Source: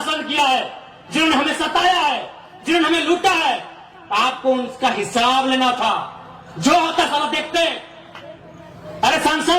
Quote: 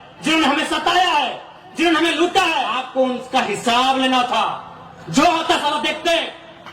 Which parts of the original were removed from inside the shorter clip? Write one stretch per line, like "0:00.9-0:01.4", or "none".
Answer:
0:03.7-0:04.3